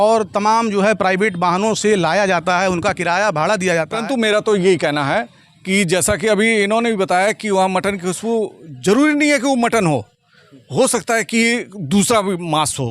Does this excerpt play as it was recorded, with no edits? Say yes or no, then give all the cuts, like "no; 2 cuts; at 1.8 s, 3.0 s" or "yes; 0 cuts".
no; 1 cut; at 3.9 s